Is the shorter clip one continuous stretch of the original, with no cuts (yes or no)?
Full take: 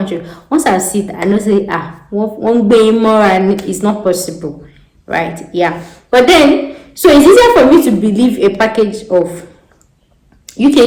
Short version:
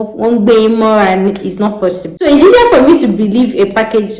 no